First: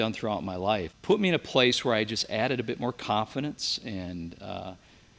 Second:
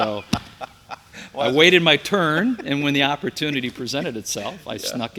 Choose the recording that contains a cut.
first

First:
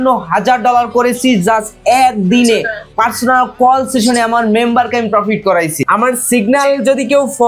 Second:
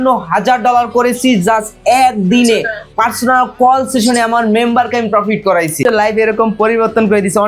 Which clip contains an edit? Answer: second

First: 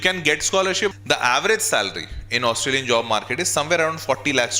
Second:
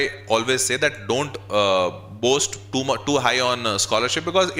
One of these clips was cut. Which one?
first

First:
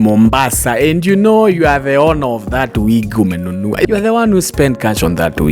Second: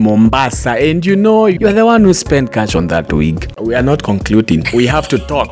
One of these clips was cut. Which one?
second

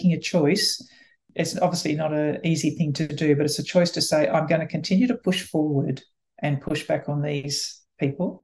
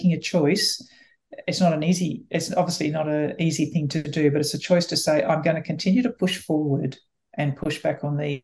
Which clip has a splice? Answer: first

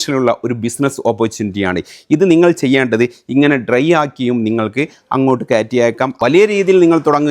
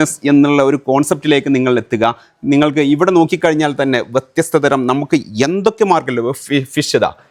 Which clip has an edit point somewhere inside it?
first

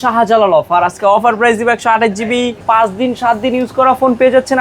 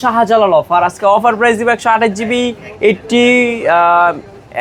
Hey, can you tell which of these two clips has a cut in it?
first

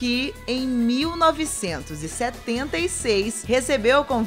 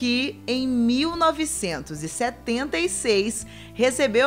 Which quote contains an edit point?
first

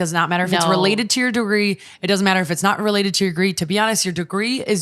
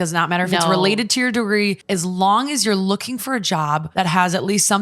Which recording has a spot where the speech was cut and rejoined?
second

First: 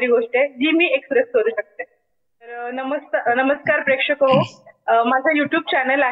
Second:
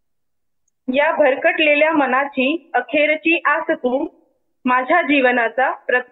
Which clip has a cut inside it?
first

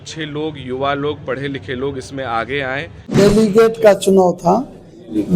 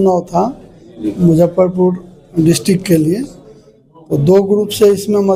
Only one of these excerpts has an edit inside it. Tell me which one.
first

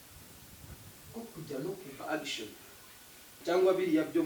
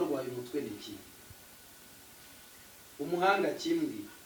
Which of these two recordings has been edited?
first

